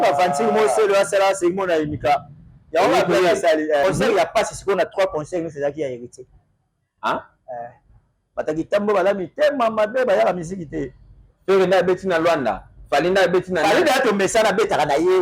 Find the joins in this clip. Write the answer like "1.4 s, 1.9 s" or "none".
3.8 s